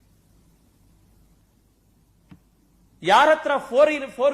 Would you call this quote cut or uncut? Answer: cut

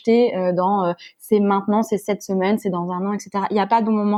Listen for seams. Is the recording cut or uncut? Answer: uncut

